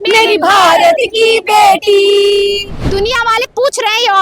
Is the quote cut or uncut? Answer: cut